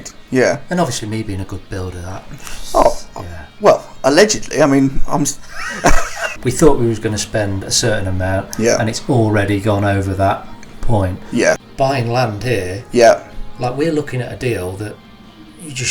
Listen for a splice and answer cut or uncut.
cut